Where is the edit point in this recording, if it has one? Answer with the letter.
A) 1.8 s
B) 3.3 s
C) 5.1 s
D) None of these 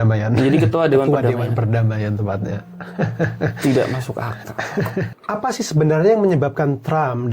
C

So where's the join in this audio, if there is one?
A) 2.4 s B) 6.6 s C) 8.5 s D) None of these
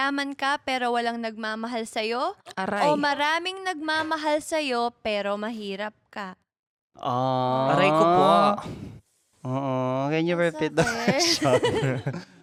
D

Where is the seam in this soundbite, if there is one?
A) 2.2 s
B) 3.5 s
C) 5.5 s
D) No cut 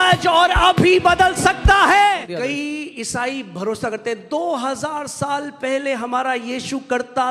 A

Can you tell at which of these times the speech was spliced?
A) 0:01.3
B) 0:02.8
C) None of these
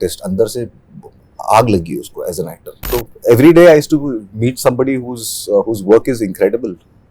B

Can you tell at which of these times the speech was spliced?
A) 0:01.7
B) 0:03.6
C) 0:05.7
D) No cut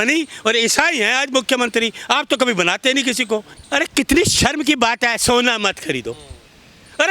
B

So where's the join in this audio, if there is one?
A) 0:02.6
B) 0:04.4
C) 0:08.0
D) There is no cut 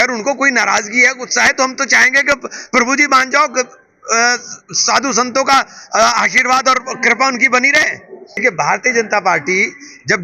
C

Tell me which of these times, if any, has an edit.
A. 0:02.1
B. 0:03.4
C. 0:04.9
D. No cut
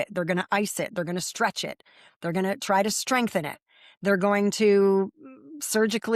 D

